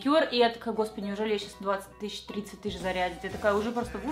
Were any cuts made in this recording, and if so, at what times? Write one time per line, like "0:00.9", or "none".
none